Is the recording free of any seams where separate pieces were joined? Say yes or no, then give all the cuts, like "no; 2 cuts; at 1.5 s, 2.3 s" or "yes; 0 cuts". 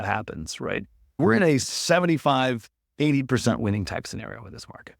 no; 1 cut; at 1.2 s